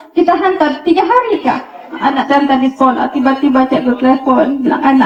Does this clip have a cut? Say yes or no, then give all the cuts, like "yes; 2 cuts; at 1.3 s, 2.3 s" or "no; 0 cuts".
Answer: no; 0 cuts